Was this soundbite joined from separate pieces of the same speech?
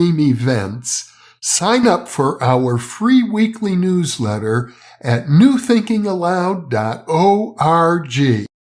no; 0 cuts

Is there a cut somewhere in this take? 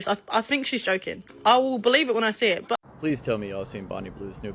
yes; 1 cut; at 2.8 s

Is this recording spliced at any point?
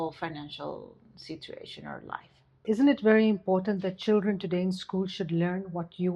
yes; 1 cut; at 2.5 s

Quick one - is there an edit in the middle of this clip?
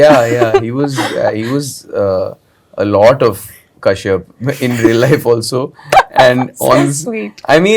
no; 0 cuts

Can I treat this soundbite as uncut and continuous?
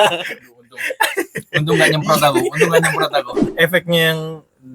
no; 1 cut; at 3.4 s

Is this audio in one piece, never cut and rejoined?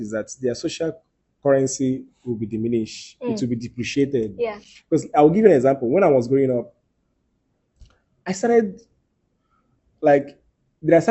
yes; 0 cuts

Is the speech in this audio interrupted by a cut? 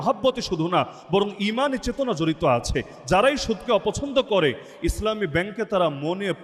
no; 0 cuts

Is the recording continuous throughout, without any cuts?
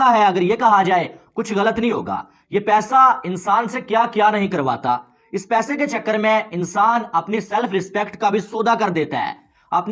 yes; 0 cuts

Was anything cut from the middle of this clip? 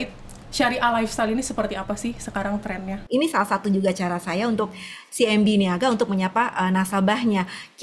yes; 1 cut; at 2.9 s

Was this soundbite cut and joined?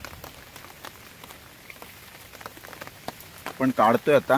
no; 0 cuts

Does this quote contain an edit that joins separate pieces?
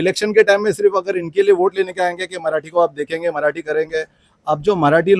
no; 0 cuts

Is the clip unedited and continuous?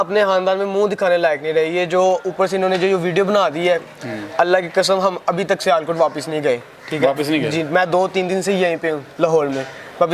yes; 0 cuts

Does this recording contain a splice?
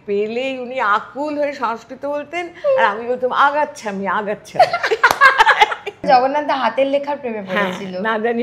yes; 1 cut; at 6.0 s

